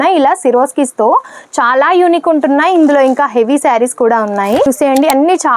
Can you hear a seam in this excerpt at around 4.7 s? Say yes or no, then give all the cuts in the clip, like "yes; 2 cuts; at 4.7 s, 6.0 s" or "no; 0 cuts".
yes; 1 cut; at 4.7 s